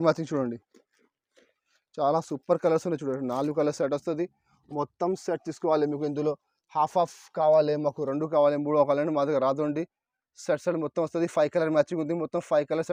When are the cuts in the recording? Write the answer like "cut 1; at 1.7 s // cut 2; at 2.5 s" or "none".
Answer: none

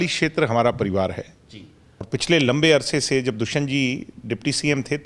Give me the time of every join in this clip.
cut 1; at 2.1 s

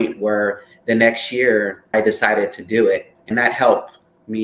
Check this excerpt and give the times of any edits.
cut 1; at 1.8 s // cut 2; at 3.2 s

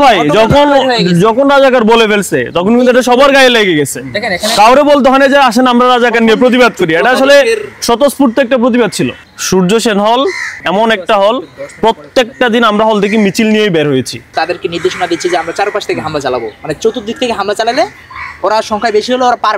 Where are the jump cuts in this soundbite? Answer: cut 1; at 9.2 s // cut 2; at 10.5 s // cut 3; at 14.3 s

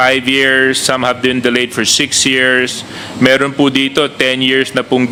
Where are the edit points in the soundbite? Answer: none

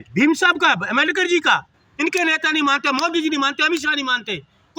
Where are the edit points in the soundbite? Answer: cut 1; at 1.8 s

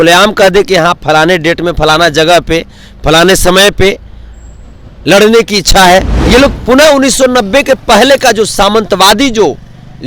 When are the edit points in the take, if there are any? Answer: cut 1; at 6.2 s

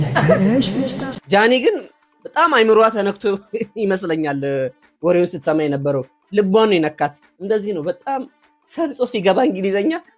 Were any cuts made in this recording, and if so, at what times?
cut 1; at 1.1 s

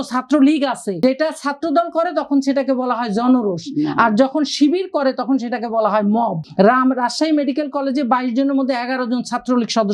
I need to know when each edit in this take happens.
cut 1; at 1.0 s // cut 2; at 6.4 s

